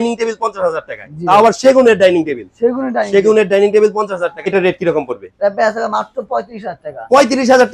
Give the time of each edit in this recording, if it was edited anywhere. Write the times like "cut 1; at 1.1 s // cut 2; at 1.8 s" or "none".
cut 1; at 4.5 s